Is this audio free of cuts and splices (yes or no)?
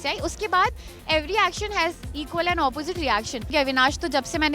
no